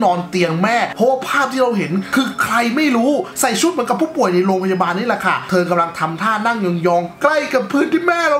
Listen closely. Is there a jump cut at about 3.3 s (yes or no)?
yes